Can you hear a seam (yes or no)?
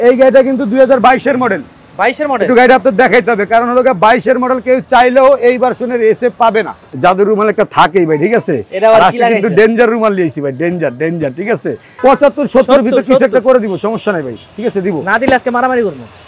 yes